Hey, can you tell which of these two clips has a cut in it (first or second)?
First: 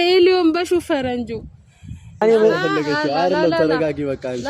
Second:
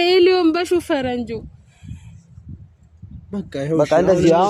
first